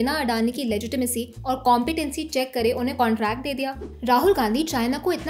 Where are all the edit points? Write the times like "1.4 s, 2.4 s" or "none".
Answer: 3.9 s